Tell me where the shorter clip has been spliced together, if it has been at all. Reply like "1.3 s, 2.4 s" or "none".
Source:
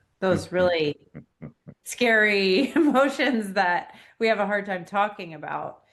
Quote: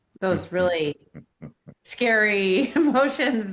none

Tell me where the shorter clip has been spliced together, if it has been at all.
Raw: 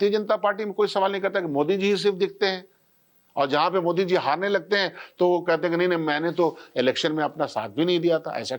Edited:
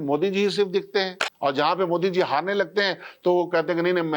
1.2 s

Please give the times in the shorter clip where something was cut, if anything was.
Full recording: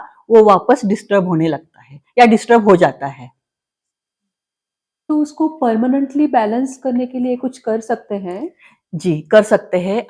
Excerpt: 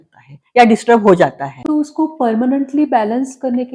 1.5 s

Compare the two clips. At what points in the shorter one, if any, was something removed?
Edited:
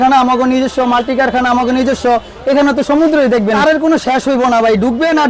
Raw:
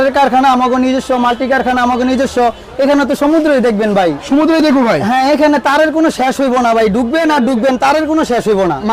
3.6 s

